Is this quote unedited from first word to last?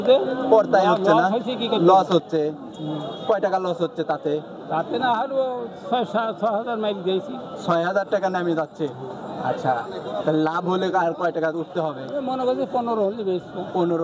yes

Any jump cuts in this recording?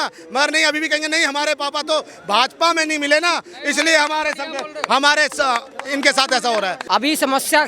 yes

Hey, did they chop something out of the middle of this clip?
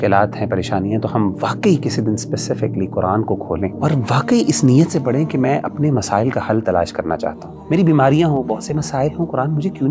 yes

